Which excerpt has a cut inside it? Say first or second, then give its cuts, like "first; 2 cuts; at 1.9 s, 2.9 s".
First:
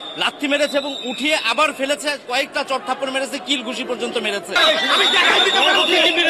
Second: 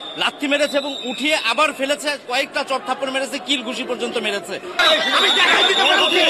first; 1 cut; at 4.5 s